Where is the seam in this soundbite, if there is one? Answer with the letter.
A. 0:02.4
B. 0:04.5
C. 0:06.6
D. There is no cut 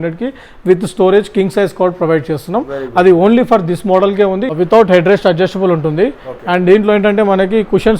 B